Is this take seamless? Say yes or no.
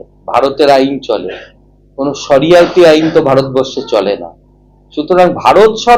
yes